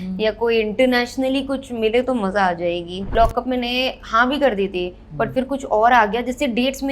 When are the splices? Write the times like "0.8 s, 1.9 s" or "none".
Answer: 3.1 s